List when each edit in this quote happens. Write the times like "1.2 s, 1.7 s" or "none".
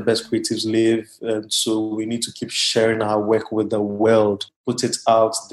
4.5 s